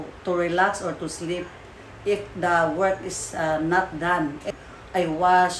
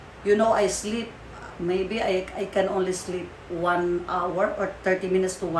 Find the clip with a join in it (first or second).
first